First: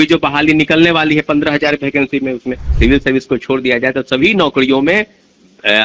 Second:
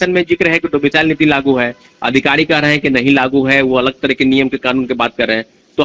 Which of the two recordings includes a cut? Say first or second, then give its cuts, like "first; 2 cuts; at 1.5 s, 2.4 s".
first; 1 cut; at 2.6 s